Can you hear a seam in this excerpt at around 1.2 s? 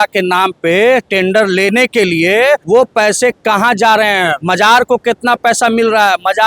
no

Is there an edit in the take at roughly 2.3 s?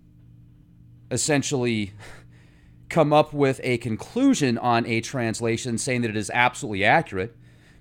no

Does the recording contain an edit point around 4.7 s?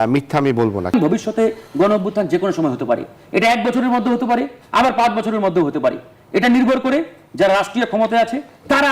no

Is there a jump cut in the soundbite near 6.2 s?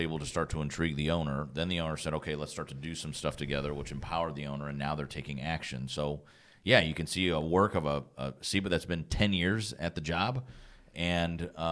no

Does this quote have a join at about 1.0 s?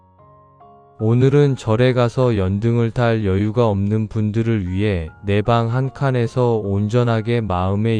yes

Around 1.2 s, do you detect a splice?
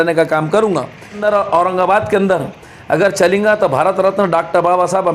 yes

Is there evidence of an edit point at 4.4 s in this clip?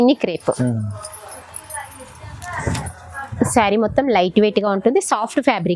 no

